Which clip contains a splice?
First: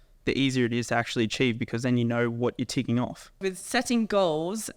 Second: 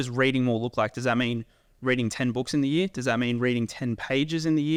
first; 1 cut; at 3.4 s

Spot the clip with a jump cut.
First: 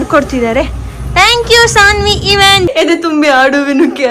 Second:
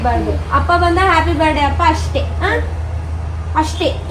first; 1 cut; at 2.7 s

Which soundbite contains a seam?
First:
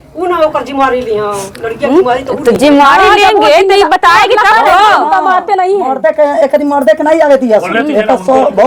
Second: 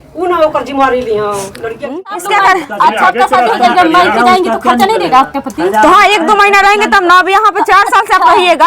second; 1 cut; at 1.9 s

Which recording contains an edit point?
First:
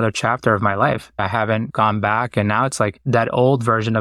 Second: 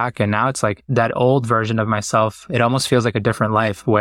first; 1 cut; at 1.2 s

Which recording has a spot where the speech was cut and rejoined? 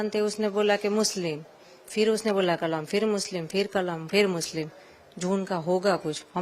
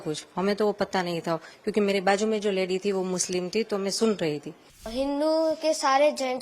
second; 1 cut; at 4.9 s

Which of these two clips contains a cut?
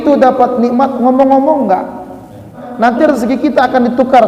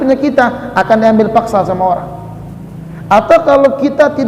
first; 1 cut; at 2.6 s

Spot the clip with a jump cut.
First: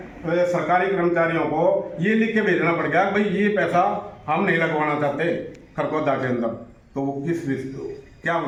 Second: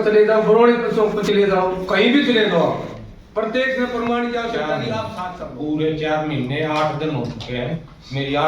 second; 1 cut; at 5.4 s

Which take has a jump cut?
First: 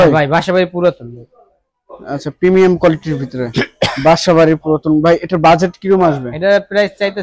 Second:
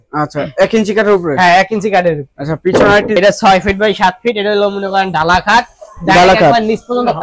second; 1 cut; at 3.2 s

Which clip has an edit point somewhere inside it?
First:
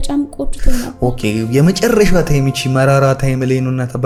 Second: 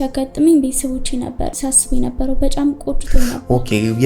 second; 1 cut; at 1.5 s

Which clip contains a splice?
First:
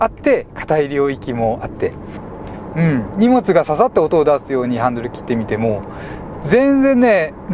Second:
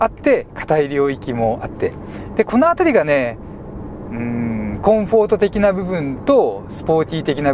first; 1 cut; at 2.1 s

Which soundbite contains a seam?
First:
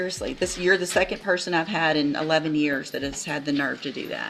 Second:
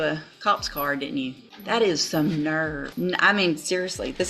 second; 2 cuts; at 1.5 s, 2.8 s

